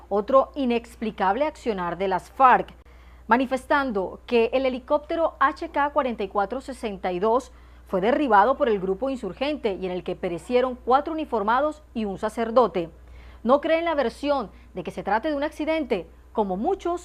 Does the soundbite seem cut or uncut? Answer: cut